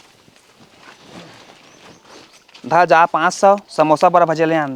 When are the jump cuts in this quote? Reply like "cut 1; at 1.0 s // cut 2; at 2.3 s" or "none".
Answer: none

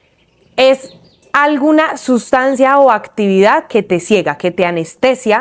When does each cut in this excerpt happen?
none

